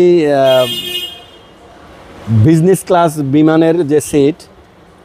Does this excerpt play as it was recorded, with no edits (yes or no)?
yes